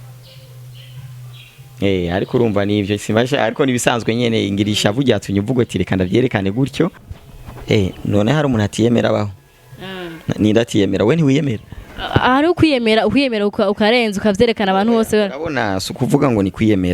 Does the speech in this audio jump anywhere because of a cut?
yes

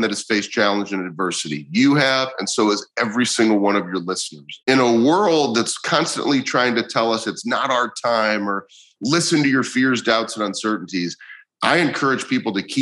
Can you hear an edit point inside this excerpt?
yes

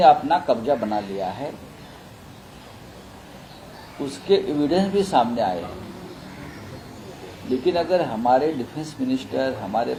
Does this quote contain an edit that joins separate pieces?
no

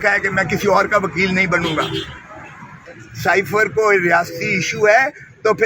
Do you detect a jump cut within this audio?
yes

